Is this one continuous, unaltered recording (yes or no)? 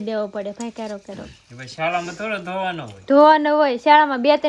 yes